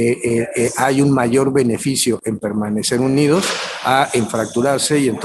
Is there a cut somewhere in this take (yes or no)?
no